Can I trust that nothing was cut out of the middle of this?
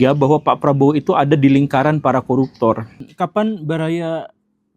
no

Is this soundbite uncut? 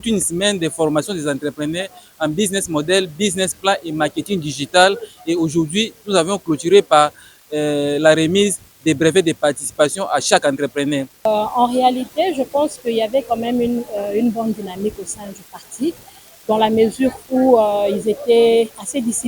no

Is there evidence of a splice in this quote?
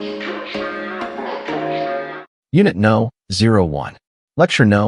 yes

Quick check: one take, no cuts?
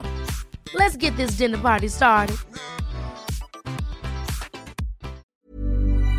no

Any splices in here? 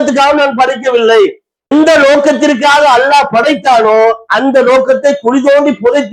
yes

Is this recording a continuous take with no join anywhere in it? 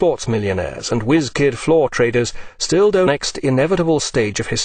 yes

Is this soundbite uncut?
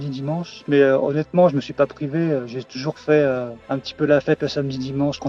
yes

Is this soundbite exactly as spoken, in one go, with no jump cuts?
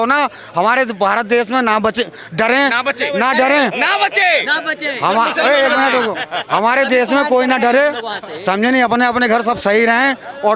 yes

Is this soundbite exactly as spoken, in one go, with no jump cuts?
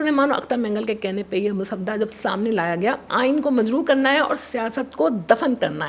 no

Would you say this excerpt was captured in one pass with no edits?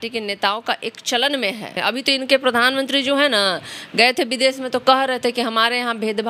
no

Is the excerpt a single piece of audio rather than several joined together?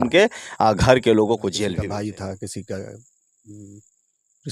no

